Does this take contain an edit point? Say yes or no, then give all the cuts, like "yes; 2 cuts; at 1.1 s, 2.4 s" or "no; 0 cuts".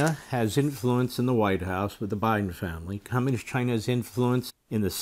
yes; 1 cut; at 4.1 s